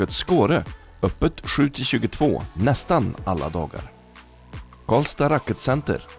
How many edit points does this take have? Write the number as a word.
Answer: zero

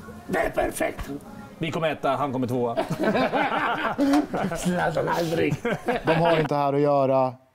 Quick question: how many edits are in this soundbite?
one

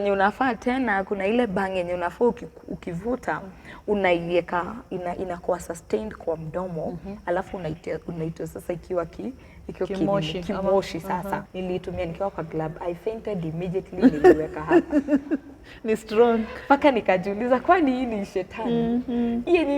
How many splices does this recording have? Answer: one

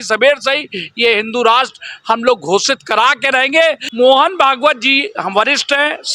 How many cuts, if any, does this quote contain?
one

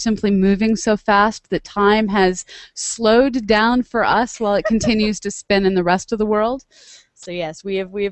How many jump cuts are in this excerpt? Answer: one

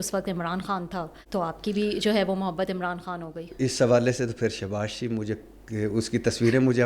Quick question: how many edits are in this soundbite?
one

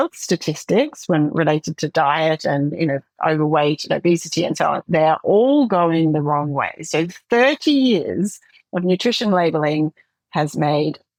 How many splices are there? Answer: zero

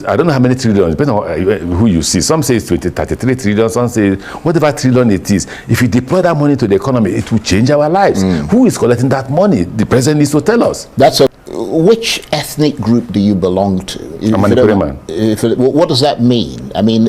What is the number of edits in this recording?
one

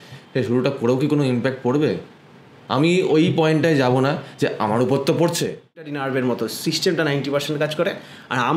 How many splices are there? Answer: one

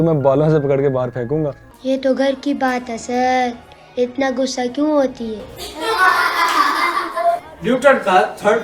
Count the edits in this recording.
two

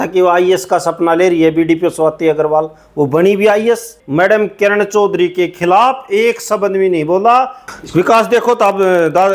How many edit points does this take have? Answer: two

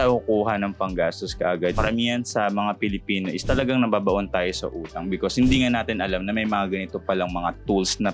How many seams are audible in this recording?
one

